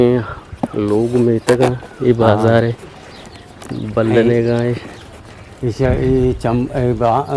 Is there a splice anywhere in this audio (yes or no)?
no